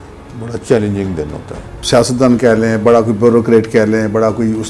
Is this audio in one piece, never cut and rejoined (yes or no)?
no